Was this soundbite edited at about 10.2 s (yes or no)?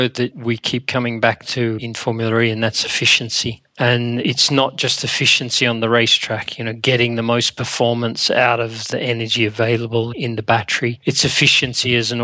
no